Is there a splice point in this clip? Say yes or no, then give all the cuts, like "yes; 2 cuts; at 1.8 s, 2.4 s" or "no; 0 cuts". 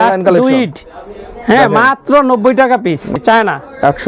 yes; 1 cut; at 3.2 s